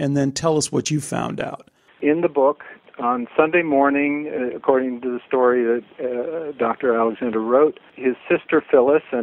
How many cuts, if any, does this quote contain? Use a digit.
3